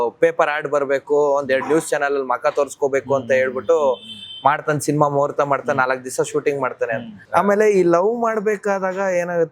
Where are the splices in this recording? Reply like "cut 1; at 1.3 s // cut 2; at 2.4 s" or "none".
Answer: cut 1; at 7.2 s